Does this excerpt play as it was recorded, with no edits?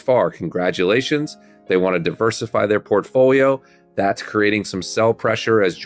yes; 0 cuts

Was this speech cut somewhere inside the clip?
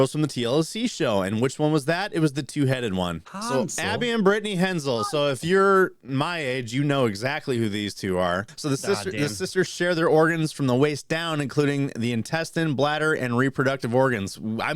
yes; 2 cuts; at 3.3 s, 8.5 s

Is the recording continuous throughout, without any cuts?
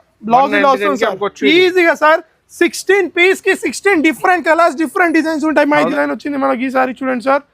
no; 1 cut; at 5.9 s

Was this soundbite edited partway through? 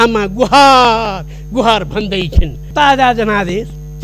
yes; 1 cut; at 2.6 s

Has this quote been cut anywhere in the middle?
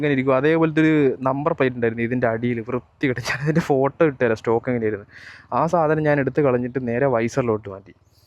no; 0 cuts

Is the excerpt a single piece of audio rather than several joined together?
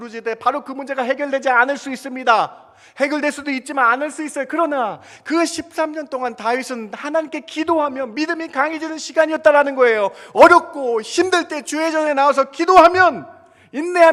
yes; 0 cuts

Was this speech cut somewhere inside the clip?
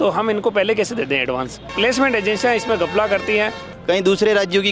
yes; 2 cuts; at 1.6 s, 3.7 s

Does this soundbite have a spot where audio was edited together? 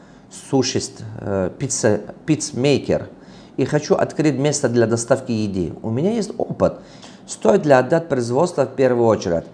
yes; 1 cut; at 6.9 s

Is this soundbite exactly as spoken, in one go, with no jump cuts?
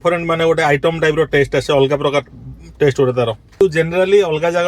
no; 1 cut; at 3.6 s

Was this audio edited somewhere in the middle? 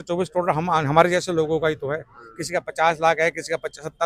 no; 0 cuts

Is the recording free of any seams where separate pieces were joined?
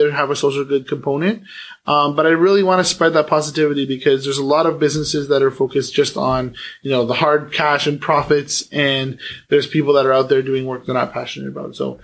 yes; 0 cuts

